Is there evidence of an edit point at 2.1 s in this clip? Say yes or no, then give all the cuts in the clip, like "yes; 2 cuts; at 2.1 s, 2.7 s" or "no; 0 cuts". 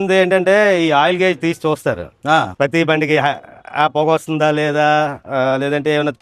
no; 0 cuts